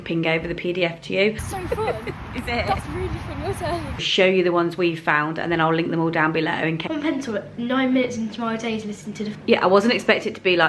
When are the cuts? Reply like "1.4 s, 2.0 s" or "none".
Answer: 1.5 s, 4.0 s, 6.8 s, 9.3 s